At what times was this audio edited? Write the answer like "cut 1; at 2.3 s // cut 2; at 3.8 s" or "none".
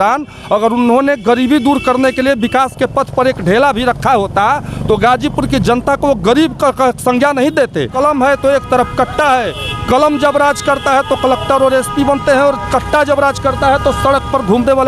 cut 1; at 7.9 s